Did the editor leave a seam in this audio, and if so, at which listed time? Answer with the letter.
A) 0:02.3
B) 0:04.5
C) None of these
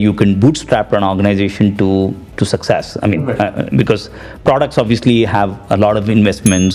A